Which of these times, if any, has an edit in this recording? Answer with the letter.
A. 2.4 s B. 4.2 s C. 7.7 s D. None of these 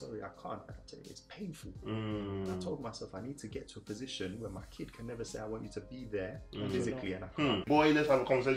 C